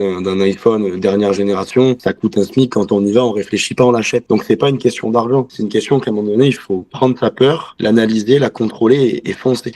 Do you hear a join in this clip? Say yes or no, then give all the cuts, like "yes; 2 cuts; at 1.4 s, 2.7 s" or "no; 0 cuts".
yes; 1 cut; at 2.0 s